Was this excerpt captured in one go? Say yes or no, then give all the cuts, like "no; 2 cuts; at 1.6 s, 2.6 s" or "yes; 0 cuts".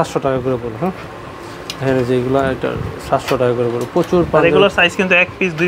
yes; 0 cuts